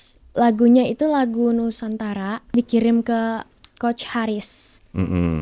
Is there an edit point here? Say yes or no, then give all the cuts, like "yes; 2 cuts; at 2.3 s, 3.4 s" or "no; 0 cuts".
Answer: yes; 1 cut; at 2.5 s